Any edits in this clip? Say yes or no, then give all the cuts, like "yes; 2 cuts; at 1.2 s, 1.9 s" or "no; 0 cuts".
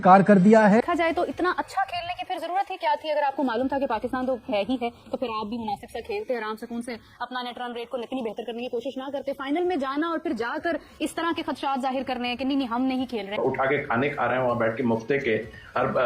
yes; 2 cuts; at 0.8 s, 13.3 s